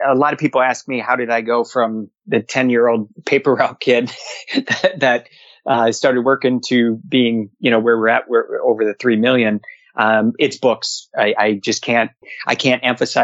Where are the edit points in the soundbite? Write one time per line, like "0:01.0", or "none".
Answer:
none